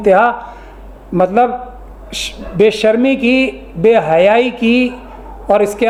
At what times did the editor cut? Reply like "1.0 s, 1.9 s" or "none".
none